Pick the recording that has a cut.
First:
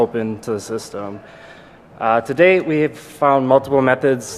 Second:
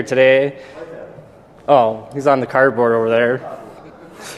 second; 1 cut; at 0.9 s

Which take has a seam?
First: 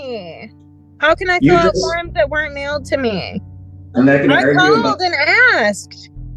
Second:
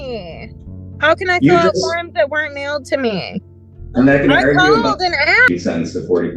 second; 1 cut; at 5.5 s

